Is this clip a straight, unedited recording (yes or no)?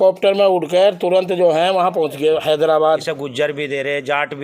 no